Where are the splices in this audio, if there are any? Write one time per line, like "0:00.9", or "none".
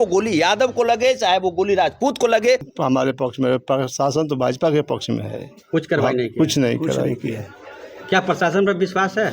0:02.7